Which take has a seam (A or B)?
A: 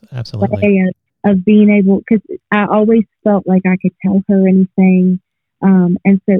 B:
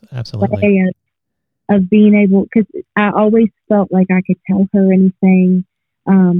A